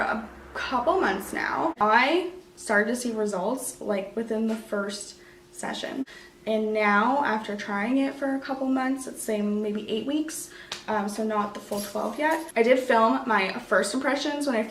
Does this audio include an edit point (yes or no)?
yes